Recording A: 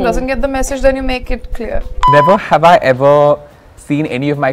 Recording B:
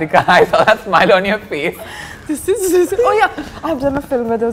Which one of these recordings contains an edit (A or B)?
A